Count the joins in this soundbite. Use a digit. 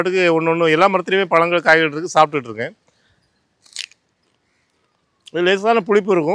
0